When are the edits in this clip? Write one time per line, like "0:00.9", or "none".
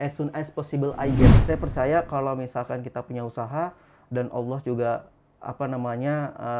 0:01.3